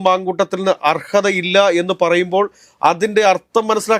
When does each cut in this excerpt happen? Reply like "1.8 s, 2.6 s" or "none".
none